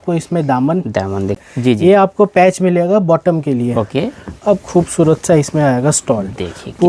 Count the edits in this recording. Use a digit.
1